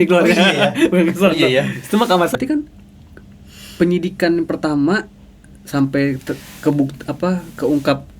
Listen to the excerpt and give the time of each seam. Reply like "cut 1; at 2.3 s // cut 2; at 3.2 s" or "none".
cut 1; at 2.3 s